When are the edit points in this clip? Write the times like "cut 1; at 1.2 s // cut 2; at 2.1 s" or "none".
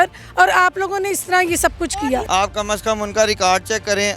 cut 1; at 2.2 s